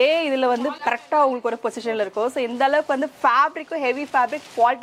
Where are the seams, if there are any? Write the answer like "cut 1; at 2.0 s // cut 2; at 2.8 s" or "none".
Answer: none